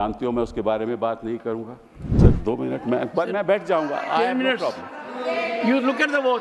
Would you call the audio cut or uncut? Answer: cut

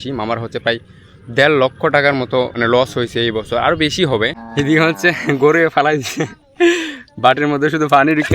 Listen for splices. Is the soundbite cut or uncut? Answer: cut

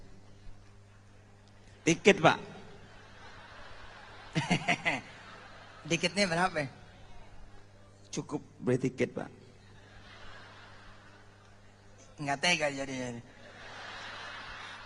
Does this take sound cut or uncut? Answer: uncut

